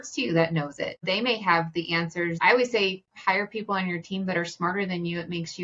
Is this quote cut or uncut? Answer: cut